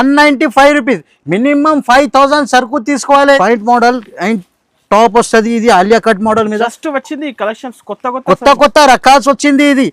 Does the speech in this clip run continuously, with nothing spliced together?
no; 1 cut; at 3.4 s

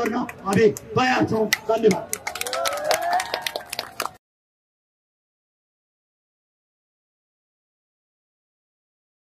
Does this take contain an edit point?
no; 0 cuts

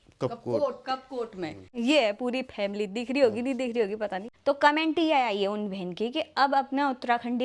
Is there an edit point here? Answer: yes; 2 cuts; at 1.7 s, 4.3 s

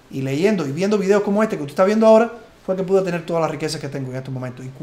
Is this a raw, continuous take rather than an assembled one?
yes; 0 cuts

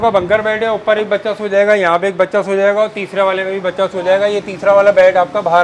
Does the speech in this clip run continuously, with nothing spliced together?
yes; 0 cuts

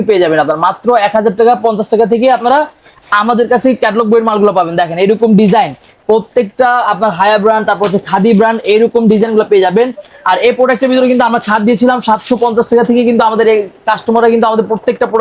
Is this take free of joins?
yes; 0 cuts

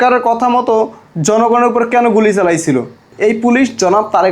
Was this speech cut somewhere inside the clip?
yes; 1 cut; at 3.1 s

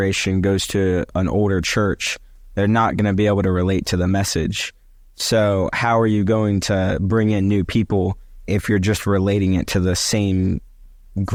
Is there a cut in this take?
no; 0 cuts

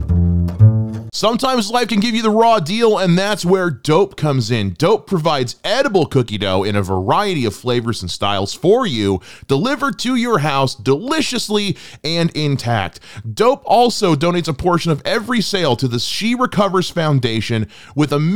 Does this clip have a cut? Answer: yes; 1 cut; at 1.0 s

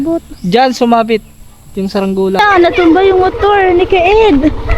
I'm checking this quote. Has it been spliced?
yes; 1 cut; at 2.4 s

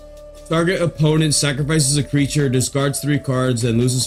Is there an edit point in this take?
no; 0 cuts

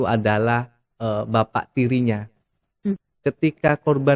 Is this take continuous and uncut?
no; 1 cut; at 3.0 s

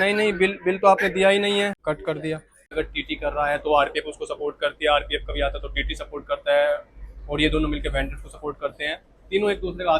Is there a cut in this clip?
yes; 1 cut; at 2.7 s

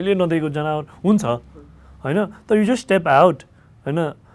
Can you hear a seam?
no; 0 cuts

